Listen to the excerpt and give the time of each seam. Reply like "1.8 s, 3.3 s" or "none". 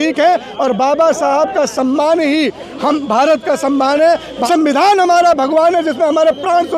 4.3 s